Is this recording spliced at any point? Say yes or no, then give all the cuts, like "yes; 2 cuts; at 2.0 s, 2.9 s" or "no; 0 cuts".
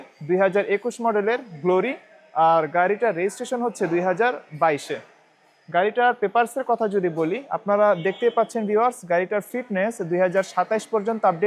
no; 0 cuts